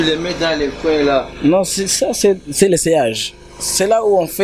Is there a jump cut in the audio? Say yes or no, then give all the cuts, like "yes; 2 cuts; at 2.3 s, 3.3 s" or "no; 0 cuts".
no; 0 cuts